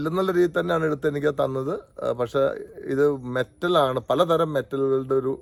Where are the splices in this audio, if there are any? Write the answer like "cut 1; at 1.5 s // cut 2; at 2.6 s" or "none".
none